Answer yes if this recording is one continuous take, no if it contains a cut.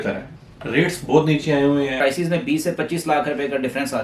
no